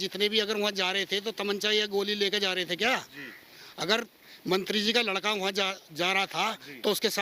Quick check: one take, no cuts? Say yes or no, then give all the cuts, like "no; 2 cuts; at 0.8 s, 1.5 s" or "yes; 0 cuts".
yes; 0 cuts